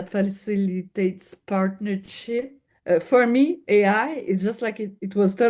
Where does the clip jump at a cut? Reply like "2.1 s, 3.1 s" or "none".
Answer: 2.6 s